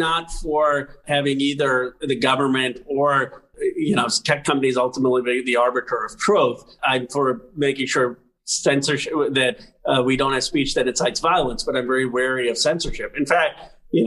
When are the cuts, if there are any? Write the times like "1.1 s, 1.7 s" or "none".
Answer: 1.0 s, 3.5 s, 6.8 s

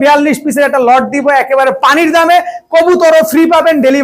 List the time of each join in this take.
none

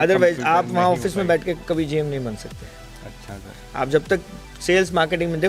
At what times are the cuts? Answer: none

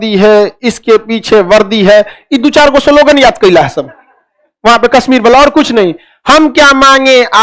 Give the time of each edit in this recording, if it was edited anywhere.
none

